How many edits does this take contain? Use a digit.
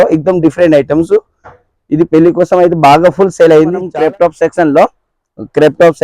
1